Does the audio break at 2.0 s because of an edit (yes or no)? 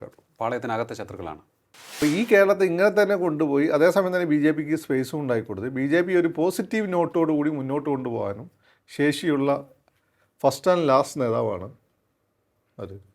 yes